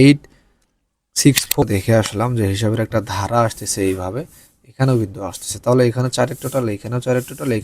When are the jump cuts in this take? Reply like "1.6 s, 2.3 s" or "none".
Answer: 1.6 s